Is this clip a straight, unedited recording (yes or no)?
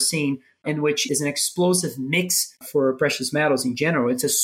no